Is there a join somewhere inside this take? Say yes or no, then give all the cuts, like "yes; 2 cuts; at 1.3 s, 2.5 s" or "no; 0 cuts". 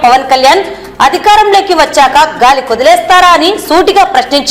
no; 0 cuts